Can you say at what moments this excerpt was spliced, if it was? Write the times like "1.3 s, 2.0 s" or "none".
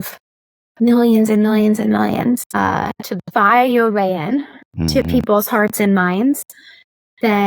2.6 s